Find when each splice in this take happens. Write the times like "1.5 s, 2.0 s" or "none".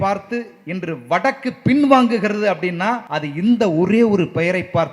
3.1 s